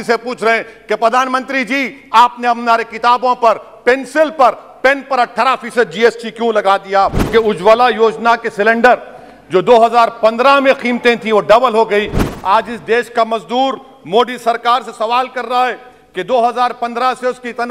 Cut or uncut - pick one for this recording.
cut